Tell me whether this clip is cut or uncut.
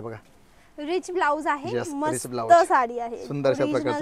uncut